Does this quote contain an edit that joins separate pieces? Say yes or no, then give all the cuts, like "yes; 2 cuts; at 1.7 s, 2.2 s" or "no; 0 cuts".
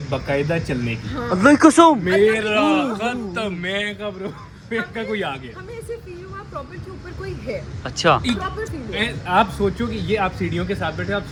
no; 0 cuts